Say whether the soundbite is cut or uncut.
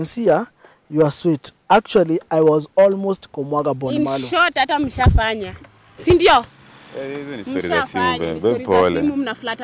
uncut